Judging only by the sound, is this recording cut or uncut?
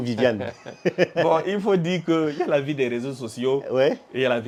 uncut